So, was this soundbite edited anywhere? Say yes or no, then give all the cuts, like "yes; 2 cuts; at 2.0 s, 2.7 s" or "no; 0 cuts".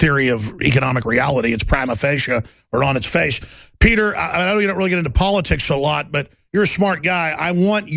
yes; 1 cut; at 5.3 s